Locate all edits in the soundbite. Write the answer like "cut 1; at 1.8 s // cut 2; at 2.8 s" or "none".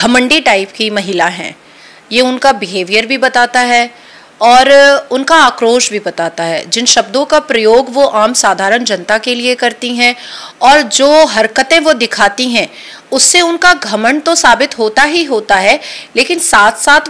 none